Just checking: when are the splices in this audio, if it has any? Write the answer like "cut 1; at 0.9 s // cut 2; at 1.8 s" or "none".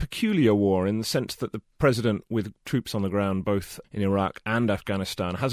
none